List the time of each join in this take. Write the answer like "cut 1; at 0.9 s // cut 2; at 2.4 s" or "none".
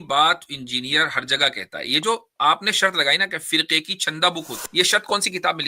cut 1; at 4.6 s